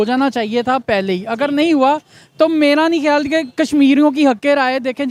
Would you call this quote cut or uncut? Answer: uncut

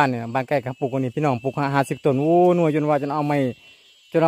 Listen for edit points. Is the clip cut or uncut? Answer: uncut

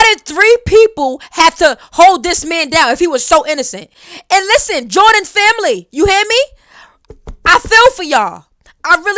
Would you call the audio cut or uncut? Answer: uncut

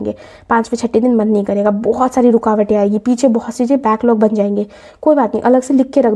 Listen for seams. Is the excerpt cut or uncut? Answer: uncut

